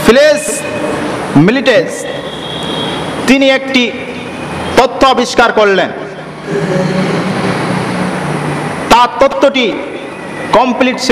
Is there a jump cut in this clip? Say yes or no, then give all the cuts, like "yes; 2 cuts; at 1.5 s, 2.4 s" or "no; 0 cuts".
no; 0 cuts